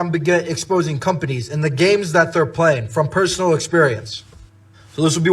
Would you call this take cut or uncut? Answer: cut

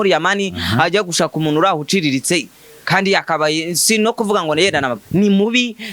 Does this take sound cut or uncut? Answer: uncut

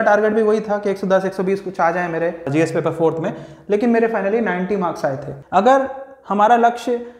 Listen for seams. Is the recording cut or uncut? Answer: cut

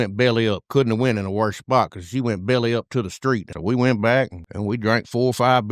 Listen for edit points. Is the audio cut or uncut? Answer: cut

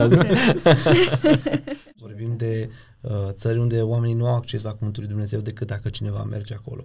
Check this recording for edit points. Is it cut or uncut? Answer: cut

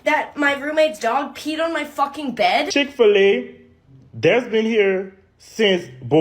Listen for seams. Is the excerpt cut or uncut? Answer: cut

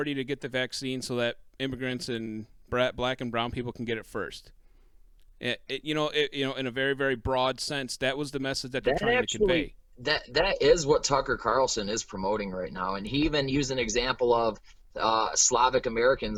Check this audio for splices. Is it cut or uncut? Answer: uncut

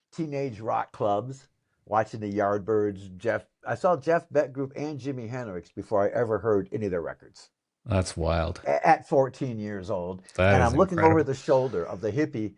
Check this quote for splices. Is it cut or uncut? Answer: uncut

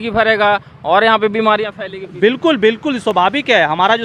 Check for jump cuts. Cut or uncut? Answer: uncut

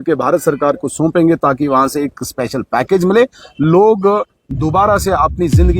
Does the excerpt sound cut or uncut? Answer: uncut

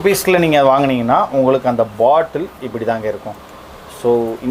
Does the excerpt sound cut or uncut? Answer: uncut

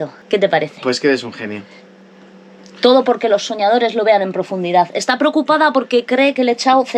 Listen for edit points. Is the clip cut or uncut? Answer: uncut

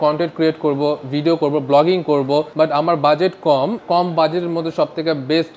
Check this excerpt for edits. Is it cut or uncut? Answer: cut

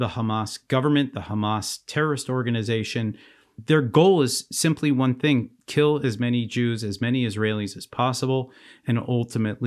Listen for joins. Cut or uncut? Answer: cut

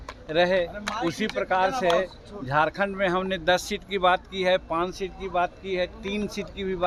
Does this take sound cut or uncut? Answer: uncut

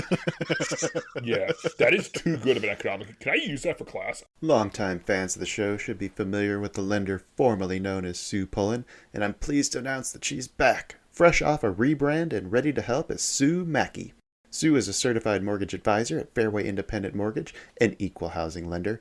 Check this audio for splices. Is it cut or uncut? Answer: cut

